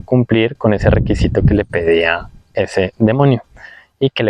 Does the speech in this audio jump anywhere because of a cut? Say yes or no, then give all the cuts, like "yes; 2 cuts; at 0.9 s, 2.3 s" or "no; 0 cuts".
no; 0 cuts